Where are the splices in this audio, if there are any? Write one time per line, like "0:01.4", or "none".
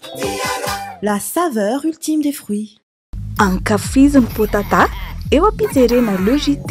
0:02.9